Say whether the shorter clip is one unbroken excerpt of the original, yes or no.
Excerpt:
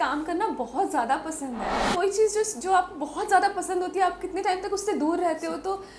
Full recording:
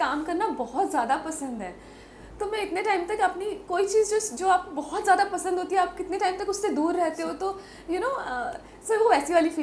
no